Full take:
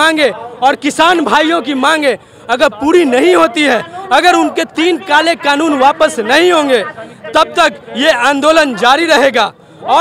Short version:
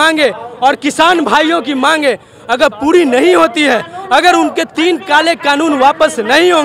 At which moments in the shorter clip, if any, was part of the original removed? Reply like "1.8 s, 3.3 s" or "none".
none

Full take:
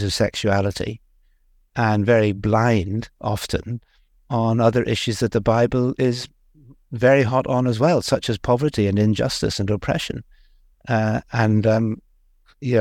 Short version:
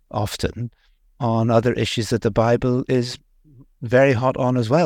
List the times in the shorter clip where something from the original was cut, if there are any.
none

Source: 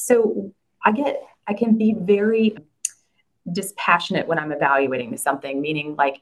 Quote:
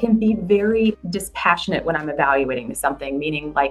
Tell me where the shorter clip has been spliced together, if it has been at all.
1.0 s

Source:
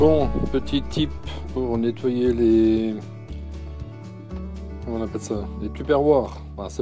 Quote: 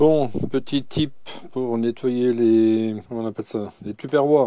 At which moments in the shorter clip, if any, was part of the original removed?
3.0 s

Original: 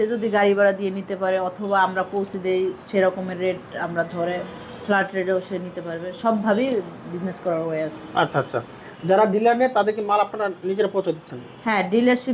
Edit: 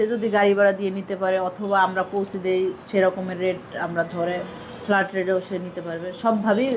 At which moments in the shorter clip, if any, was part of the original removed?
none

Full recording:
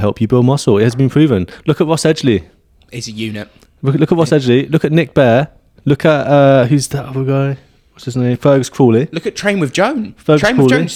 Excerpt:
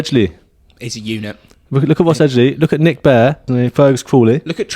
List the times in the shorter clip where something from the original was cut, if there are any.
3.4 s

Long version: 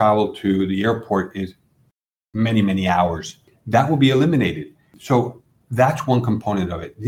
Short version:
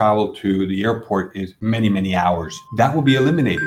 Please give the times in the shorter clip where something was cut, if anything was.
1.5 s, 2.6 s

